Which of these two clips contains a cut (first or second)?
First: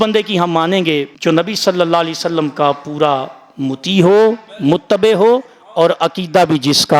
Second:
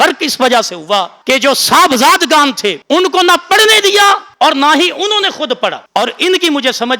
second